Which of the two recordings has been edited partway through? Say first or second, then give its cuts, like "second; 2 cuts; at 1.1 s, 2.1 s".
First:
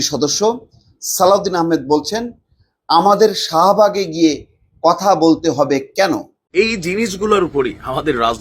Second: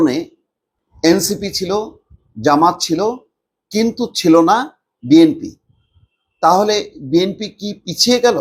first; 1 cut; at 6.4 s